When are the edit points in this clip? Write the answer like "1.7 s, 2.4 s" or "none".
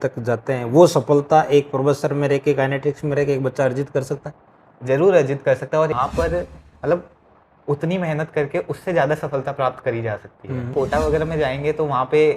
5.9 s, 10.7 s

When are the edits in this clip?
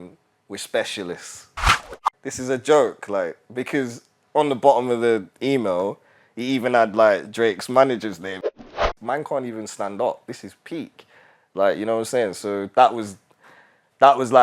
1.8 s, 8.7 s

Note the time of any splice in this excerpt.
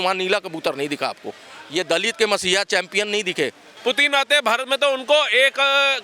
3.7 s

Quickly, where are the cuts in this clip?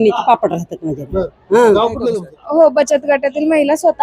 2.0 s

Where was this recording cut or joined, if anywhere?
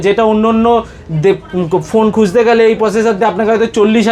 none

